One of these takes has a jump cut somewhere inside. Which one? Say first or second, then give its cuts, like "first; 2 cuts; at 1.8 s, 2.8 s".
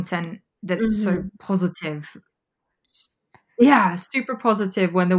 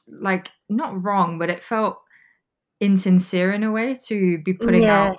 first; 1 cut; at 2.5 s